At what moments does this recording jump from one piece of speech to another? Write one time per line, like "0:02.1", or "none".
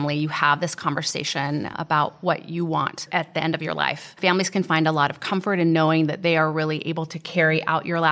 0:01.8
0:04.2